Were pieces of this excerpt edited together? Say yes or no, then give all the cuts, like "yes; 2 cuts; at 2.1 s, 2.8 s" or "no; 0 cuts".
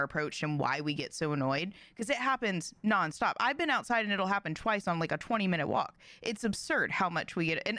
no; 0 cuts